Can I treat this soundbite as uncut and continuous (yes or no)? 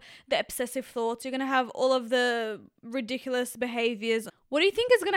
no